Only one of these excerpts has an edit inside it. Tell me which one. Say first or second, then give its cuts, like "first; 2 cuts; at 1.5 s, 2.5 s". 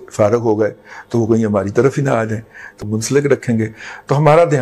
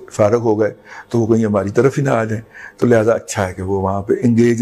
first; 1 cut; at 2.8 s